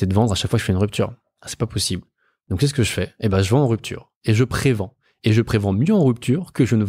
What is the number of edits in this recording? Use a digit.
0